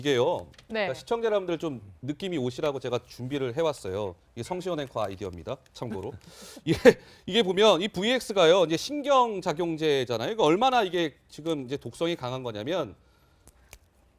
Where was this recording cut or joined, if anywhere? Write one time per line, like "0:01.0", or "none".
0:11.9